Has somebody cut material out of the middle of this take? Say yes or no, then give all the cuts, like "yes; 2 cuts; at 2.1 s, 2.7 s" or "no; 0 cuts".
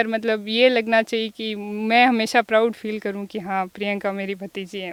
no; 0 cuts